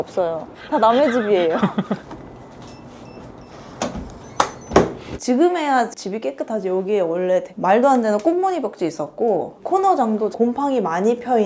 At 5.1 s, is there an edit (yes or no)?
yes